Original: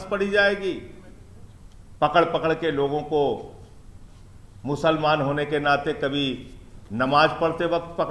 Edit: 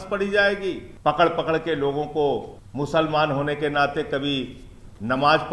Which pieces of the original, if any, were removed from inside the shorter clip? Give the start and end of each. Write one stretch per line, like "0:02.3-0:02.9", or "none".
0:00.9-0:01.8
0:03.5-0:04.5